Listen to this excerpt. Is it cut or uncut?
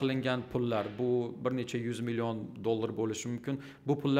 uncut